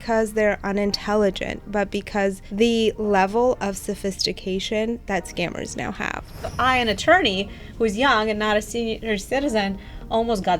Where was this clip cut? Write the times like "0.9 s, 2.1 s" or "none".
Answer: 2.4 s, 6.5 s, 9.0 s

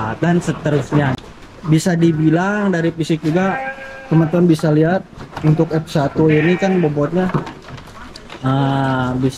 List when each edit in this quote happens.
1.1 s

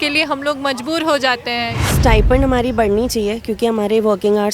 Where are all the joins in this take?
1.8 s

